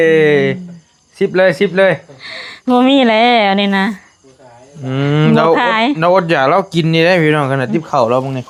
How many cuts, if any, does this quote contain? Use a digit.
0